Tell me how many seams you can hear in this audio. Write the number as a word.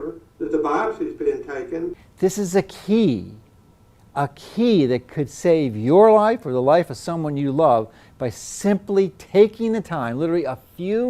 one